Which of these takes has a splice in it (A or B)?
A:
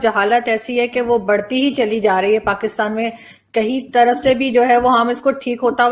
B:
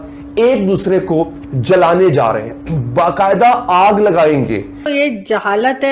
B